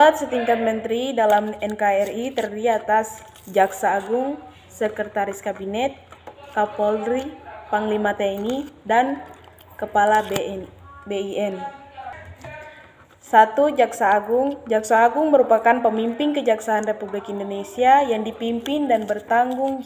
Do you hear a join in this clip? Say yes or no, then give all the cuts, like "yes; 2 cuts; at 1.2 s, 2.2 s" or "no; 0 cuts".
no; 0 cuts